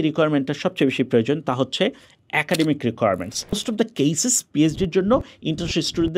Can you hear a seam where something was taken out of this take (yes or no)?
yes